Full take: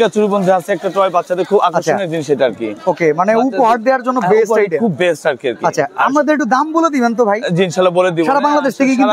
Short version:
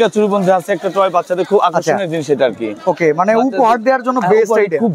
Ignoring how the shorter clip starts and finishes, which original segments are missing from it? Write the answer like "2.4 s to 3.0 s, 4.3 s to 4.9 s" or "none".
none